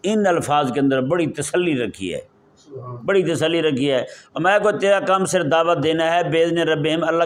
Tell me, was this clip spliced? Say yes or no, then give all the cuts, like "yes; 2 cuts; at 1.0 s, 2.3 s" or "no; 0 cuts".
no; 0 cuts